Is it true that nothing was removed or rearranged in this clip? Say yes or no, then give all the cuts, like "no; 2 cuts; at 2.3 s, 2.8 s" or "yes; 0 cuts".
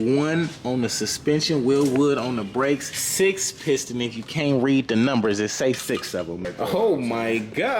no; 2 cuts; at 3.0 s, 6.4 s